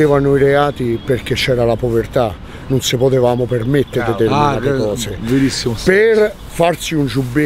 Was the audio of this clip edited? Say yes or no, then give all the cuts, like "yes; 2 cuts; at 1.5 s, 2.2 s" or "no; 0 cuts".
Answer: no; 0 cuts